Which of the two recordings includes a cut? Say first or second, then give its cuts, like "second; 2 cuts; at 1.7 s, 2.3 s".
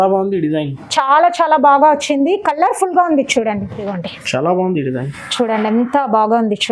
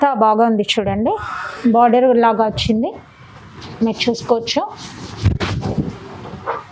first; 1 cut; at 3.9 s